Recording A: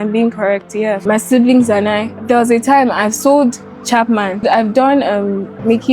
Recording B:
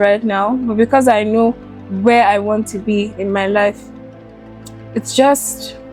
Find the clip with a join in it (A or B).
A